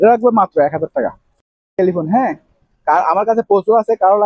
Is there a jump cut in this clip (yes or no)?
no